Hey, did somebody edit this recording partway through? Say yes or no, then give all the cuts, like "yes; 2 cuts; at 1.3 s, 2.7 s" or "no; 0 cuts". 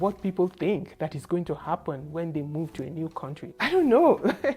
yes; 1 cut; at 3.4 s